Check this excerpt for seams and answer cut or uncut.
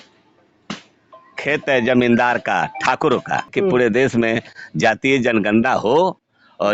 cut